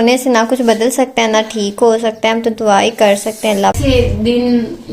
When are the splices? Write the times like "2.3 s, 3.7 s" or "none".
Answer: 3.8 s